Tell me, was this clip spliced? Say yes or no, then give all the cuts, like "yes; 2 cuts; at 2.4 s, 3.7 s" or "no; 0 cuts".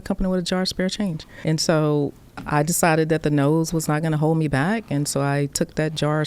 no; 0 cuts